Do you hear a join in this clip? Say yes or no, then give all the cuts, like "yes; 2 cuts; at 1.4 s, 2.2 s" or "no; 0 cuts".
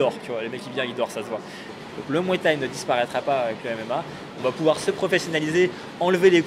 yes; 1 cut; at 1.7 s